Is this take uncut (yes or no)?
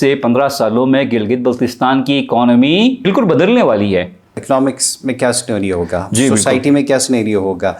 no